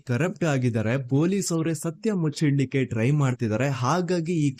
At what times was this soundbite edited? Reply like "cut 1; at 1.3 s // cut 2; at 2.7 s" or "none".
none